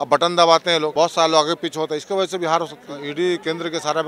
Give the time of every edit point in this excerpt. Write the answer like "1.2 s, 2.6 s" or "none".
0.9 s, 3.0 s